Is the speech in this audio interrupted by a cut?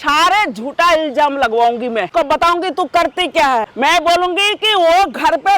yes; 2 cuts; at 2.1 s, 3.7 s

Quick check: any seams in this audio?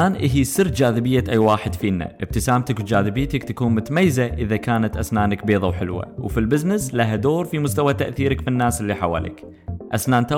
no; 0 cuts

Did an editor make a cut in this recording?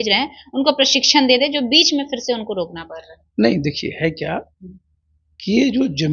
no; 0 cuts

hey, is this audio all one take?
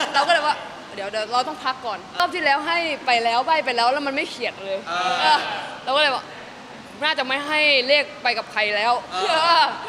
no; 1 cut; at 2.2 s

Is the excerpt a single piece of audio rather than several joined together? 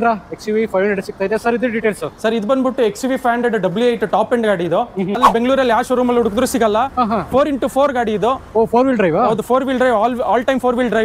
no; 1 cut; at 5.2 s

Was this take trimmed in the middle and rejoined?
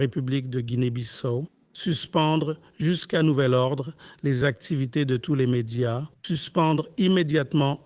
yes; 2 cuts; at 1.6 s, 6.1 s

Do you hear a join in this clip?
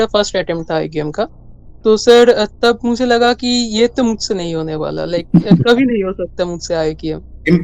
no; 0 cuts

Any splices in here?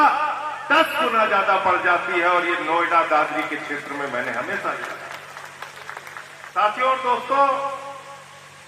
yes; 1 cut; at 6.4 s

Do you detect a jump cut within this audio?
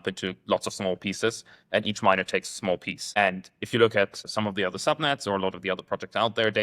yes; 2 cuts; at 3.0 s, 4.2 s

